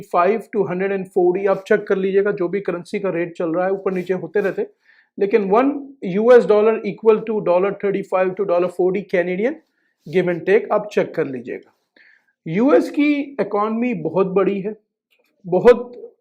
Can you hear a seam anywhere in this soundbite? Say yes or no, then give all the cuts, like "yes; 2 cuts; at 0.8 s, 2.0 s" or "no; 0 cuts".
no; 0 cuts